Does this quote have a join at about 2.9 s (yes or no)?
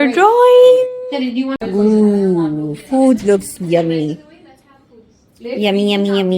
no